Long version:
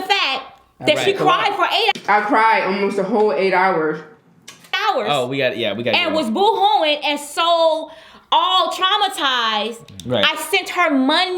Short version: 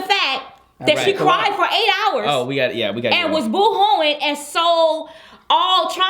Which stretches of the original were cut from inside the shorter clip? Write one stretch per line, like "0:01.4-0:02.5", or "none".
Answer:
0:02.0-0:04.8